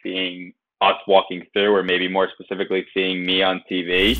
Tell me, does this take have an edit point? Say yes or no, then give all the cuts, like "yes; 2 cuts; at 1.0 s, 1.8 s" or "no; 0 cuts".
no; 0 cuts